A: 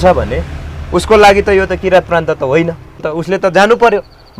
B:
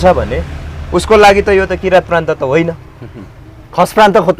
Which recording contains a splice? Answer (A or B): A